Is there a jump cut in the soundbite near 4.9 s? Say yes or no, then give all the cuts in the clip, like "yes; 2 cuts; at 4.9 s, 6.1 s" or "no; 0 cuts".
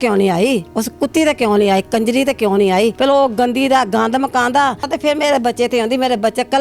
yes; 2 cuts; at 3.0 s, 4.9 s